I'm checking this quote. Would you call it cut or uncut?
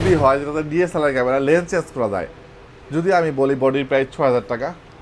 uncut